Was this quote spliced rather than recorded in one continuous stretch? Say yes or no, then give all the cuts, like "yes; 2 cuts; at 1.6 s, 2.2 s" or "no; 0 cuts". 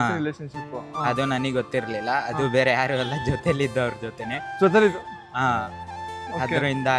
no; 0 cuts